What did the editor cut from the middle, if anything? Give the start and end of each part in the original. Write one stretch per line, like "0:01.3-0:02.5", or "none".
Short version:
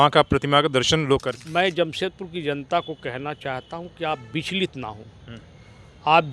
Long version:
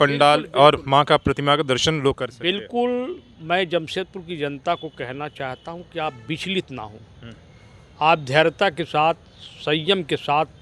0:02.3-0:03.3